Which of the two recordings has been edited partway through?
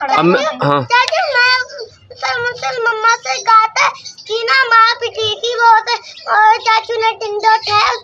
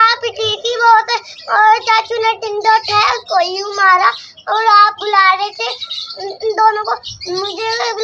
second; 1 cut; at 4.2 s

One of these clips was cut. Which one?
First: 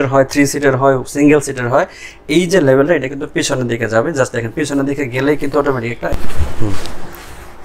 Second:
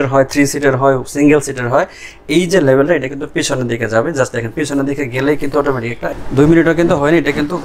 second; 1 cut; at 6.1 s

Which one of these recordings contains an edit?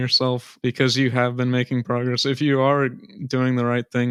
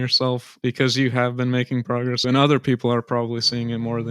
second; 1 cut; at 2.2 s

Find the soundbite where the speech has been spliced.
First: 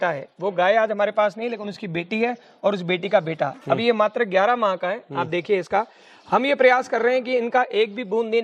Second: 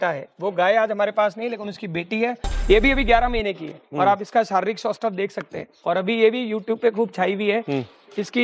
second; 1 cut; at 2.5 s

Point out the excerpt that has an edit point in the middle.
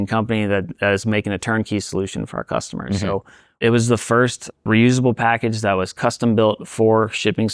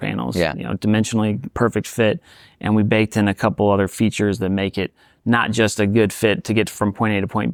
first; 2 cuts; at 3.6 s, 4.6 s

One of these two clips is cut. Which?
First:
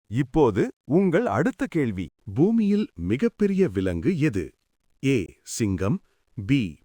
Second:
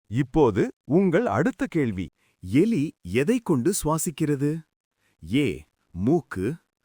first; 1 cut; at 2.0 s

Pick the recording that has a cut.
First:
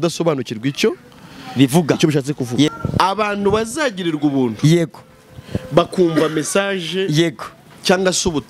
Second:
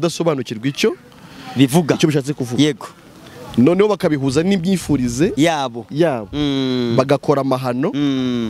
first; 1 cut; at 2.8 s

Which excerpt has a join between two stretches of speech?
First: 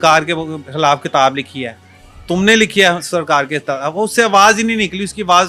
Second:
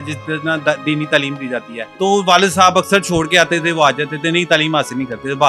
second; 1 cut; at 1.8 s

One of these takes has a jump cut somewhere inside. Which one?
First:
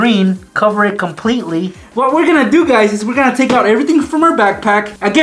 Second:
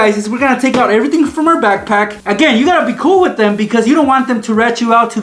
first; 1 cut; at 1.8 s

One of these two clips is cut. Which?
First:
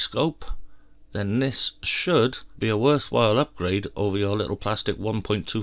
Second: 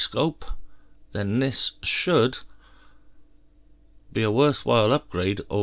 first; 1 cut; at 2.5 s

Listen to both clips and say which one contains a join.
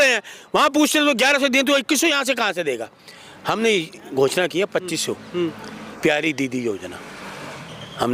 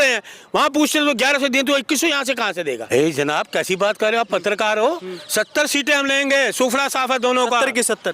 second; 1 cut; at 2.8 s

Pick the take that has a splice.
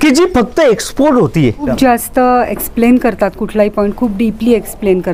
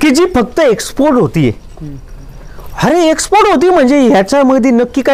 first; 1 cut; at 1.7 s

